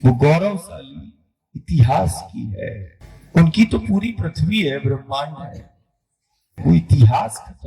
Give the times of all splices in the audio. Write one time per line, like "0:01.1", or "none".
0:02.9
0:06.4